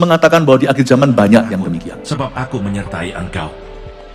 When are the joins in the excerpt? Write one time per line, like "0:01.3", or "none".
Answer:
0:02.0